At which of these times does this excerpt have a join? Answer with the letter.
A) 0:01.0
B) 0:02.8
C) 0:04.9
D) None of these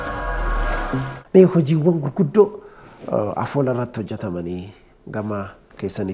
A